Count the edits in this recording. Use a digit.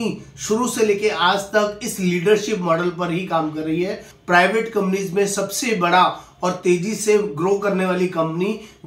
1